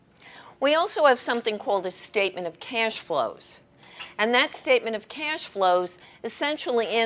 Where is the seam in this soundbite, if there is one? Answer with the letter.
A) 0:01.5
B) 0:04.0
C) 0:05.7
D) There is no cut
A